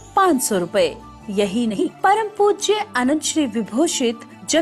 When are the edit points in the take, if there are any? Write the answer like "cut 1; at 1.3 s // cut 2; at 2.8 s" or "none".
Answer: cut 1; at 1.8 s